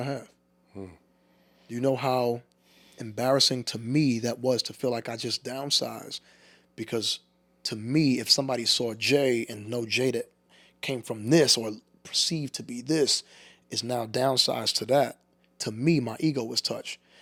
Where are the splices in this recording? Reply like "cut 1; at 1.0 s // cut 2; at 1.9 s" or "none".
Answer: none

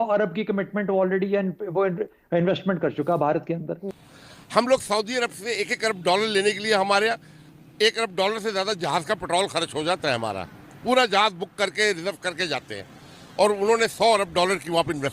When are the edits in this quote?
cut 1; at 3.9 s

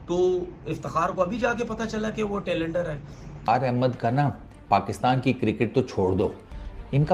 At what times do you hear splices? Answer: cut 1; at 3.4 s

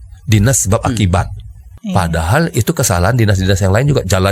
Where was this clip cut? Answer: cut 1; at 1.7 s

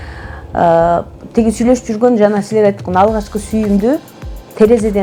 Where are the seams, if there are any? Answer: none

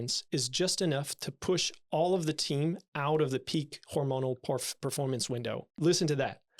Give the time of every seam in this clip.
cut 1; at 5.7 s

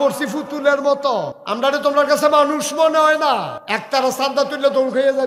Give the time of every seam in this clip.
cut 1; at 1.4 s // cut 2; at 3.6 s

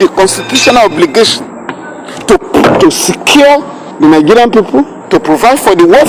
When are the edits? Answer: cut 1; at 3.8 s // cut 2; at 5.0 s

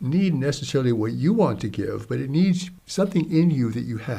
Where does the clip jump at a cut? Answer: cut 1; at 2.8 s

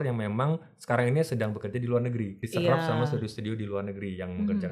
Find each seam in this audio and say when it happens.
cut 1; at 2.4 s

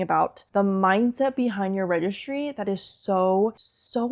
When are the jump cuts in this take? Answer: none

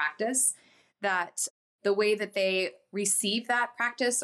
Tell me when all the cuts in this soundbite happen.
cut 1; at 1.5 s

